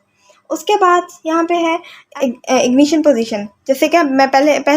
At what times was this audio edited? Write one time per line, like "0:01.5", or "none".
0:02.0